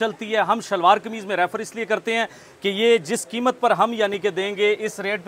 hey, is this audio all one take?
yes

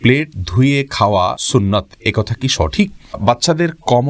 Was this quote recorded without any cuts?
no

